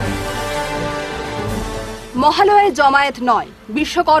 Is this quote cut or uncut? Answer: uncut